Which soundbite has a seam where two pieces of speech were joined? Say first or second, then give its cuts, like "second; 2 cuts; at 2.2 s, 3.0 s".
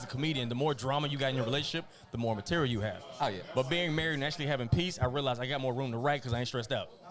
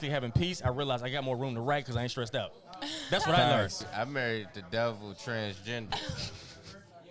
second; 1 cut; at 3.8 s